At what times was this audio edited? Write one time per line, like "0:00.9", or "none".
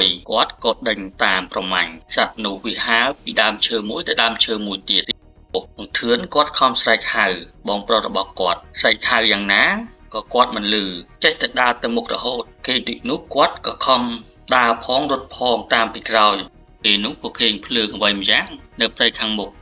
0:05.3
0:16.7